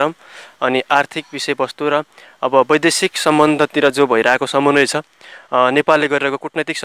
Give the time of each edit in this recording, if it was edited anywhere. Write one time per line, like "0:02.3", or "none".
none

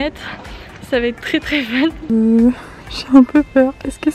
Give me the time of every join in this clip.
0:02.0

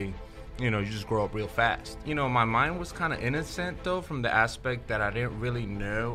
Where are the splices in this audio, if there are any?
0:02.0

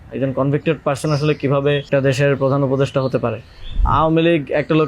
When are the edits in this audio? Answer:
0:01.9
0:03.8

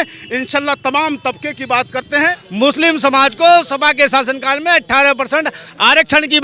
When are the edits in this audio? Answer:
0:02.1

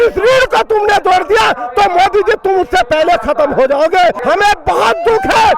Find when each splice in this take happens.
0:04.2

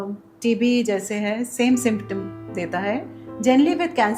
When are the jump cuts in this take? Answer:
none

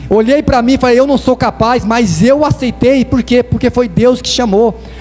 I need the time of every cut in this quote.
none

